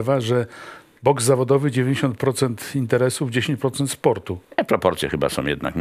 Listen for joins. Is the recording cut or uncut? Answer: cut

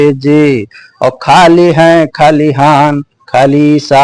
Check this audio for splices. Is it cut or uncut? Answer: uncut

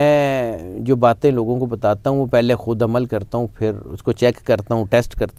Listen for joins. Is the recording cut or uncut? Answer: uncut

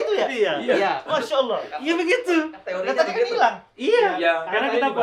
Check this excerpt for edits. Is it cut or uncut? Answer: uncut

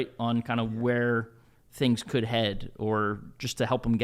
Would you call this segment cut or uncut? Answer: uncut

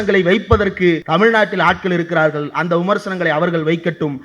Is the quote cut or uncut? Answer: cut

